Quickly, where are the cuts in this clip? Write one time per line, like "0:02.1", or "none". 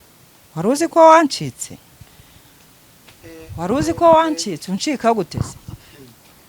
none